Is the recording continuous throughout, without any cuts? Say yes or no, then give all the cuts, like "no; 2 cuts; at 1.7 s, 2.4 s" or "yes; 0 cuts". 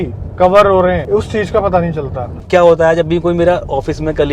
no; 2 cuts; at 1.0 s, 2.4 s